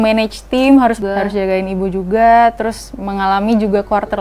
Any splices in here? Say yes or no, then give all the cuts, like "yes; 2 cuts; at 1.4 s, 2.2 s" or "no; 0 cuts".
yes; 1 cut; at 1.0 s